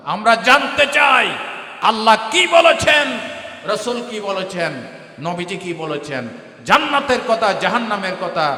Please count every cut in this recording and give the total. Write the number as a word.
zero